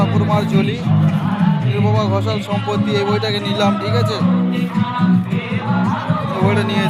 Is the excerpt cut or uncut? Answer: uncut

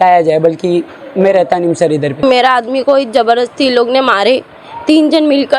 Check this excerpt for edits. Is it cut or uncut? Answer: cut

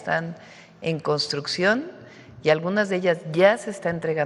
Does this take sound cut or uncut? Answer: uncut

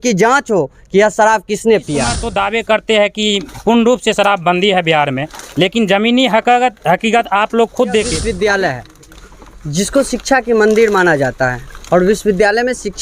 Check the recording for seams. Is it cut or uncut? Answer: cut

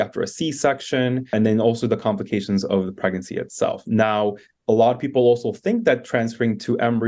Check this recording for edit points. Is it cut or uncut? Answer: cut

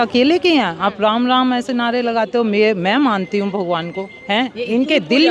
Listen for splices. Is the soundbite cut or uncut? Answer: uncut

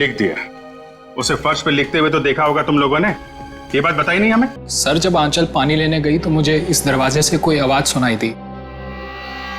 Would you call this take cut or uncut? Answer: cut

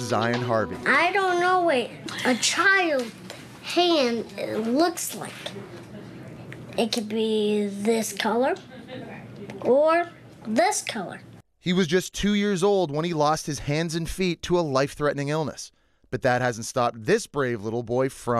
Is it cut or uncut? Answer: cut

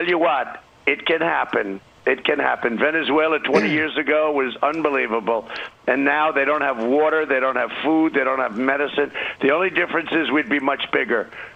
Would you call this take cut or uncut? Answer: uncut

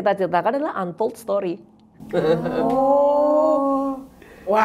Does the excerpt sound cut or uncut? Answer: uncut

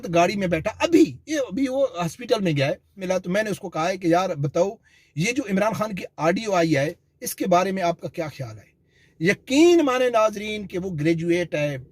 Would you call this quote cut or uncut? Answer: cut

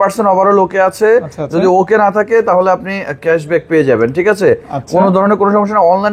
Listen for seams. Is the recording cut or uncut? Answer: uncut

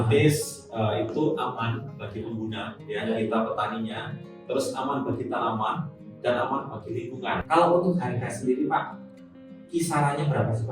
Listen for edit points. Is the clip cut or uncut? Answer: cut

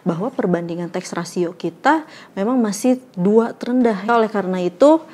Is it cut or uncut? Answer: cut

